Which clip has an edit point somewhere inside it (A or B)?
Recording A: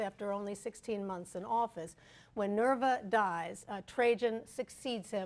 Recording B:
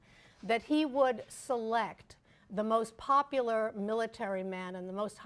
A